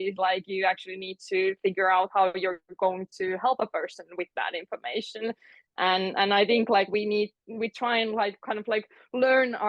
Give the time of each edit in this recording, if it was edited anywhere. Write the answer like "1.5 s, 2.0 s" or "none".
none